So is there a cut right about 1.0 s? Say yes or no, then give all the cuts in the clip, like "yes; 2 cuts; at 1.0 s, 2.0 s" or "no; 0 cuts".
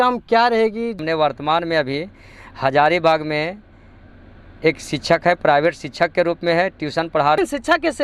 yes; 2 cuts; at 1.0 s, 7.4 s